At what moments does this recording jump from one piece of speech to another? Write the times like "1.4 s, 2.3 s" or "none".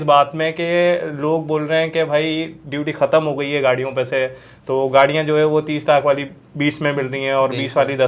none